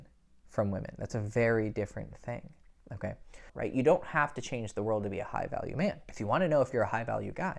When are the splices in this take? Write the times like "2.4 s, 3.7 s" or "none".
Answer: 3.5 s, 6.1 s